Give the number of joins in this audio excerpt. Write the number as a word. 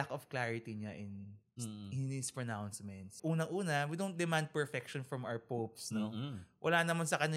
one